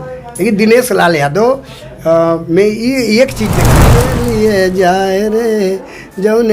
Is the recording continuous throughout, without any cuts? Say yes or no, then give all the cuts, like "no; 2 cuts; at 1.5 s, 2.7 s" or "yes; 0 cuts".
no; 1 cut; at 3.8 s